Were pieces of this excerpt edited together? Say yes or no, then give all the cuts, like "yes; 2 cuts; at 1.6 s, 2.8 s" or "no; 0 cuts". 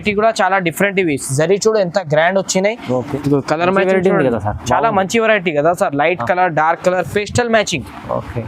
yes; 1 cut; at 2.9 s